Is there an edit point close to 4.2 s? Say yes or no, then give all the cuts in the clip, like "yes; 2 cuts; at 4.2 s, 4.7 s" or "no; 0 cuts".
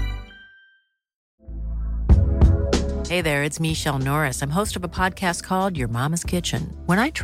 no; 1 cut; at 1.3 s